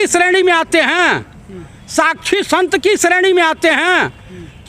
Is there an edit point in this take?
no; 0 cuts

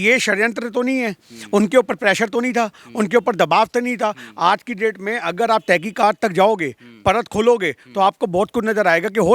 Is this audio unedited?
yes; 0 cuts

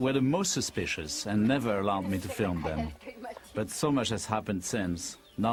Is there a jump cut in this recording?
no; 0 cuts

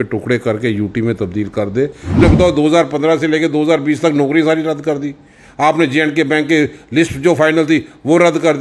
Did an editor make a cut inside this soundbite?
yes; 1 cut; at 2.2 s

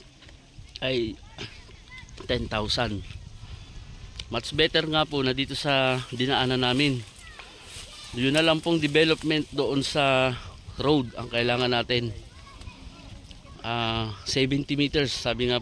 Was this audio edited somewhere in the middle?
no; 0 cuts

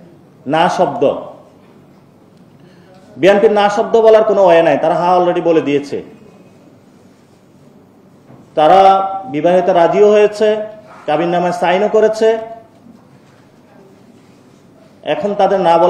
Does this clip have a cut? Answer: no; 0 cuts

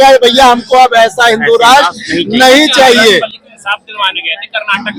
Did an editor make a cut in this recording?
no; 0 cuts

